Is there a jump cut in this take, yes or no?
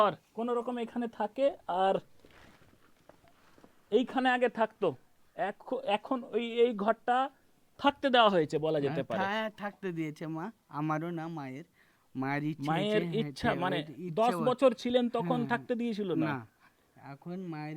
no